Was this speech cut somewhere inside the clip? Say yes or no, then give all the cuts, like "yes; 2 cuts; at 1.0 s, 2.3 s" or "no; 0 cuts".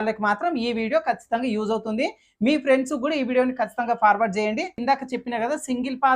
yes; 1 cut; at 4.7 s